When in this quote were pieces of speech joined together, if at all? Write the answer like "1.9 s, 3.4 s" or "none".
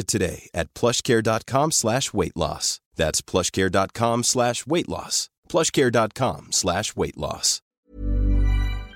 7.8 s

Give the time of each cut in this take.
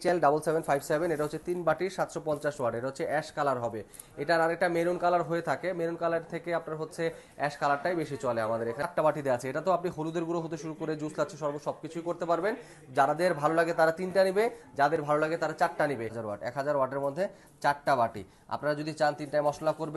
8.9 s, 16.2 s

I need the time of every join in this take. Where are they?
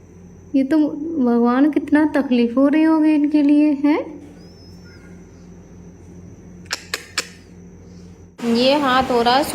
8.2 s

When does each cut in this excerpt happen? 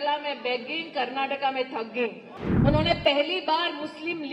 2.3 s

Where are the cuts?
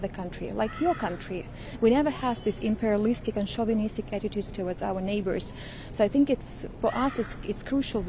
none

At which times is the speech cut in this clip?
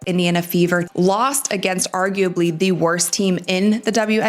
1.0 s

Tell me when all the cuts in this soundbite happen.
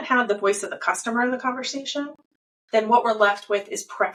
none

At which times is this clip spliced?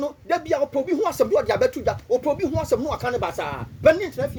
none

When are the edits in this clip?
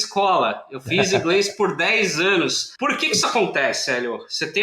2.7 s

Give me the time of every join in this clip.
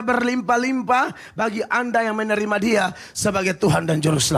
none

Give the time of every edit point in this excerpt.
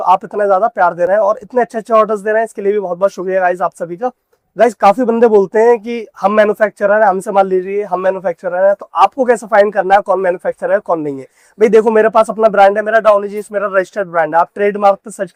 none

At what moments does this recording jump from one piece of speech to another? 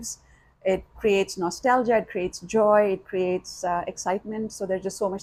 none

